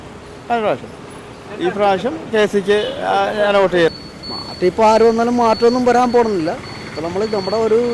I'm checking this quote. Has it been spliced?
yes; 1 cut; at 3.9 s

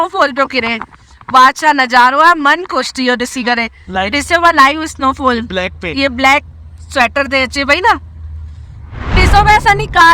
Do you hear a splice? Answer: no; 0 cuts

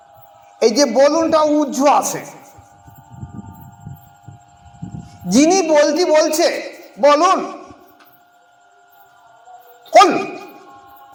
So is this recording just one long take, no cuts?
yes; 0 cuts

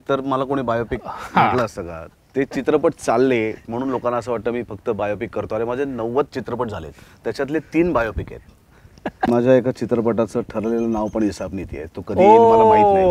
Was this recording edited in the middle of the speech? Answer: yes; 1 cut; at 9.3 s

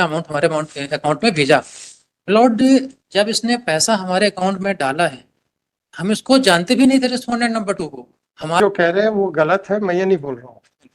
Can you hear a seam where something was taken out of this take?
yes; 1 cut; at 8.6 s

